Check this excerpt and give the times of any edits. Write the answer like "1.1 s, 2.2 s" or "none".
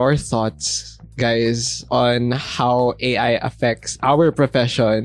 1.7 s